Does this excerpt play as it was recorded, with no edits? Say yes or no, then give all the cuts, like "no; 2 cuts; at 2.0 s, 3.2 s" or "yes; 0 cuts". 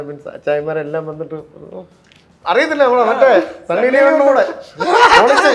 yes; 0 cuts